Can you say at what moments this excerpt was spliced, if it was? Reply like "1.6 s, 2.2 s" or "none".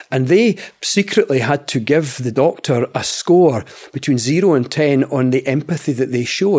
2.2 s